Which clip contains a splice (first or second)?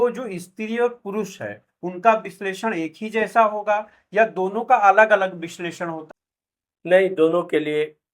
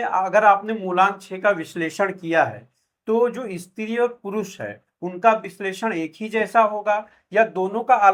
first